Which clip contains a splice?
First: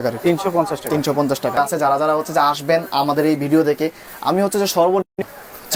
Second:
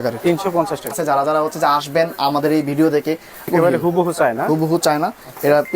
second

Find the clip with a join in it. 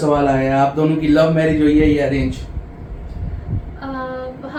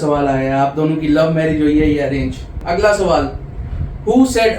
second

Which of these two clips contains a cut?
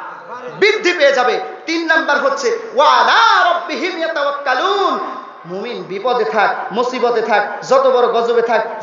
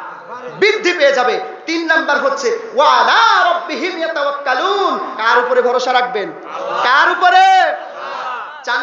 second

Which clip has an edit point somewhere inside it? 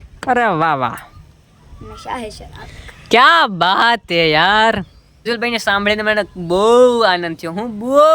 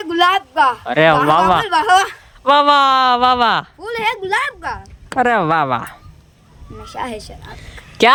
first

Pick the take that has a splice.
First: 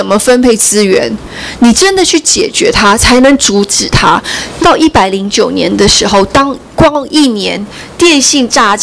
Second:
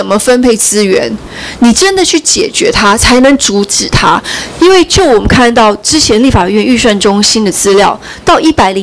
first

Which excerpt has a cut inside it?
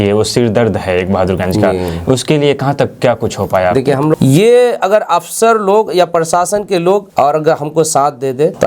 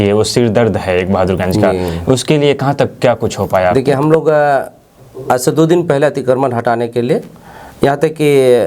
first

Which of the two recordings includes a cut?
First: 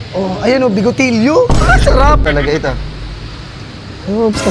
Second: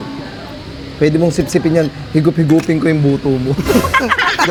first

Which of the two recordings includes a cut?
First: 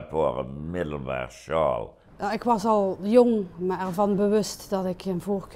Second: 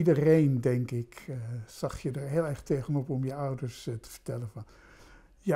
first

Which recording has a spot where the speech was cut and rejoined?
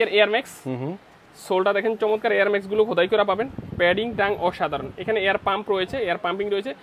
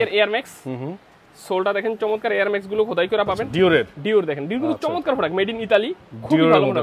second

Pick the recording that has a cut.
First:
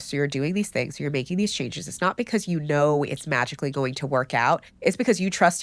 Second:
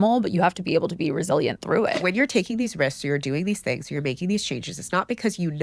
second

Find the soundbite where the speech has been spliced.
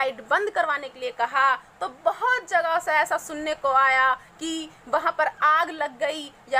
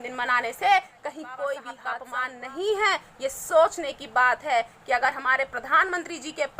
second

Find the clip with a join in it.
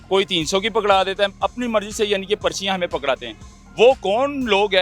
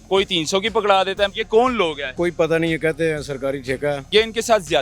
second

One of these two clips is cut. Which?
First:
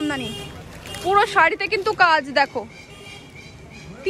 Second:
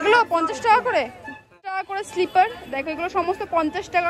second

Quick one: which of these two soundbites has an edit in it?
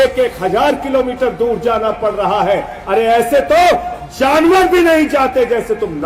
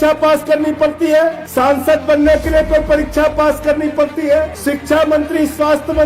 second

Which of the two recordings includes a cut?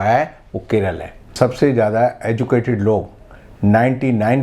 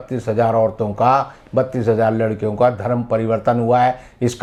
first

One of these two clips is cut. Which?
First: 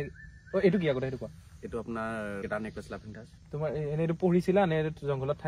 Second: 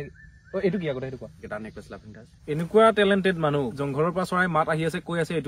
second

